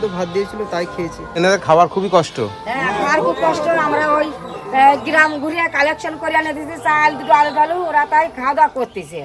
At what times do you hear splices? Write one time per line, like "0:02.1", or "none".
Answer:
0:01.4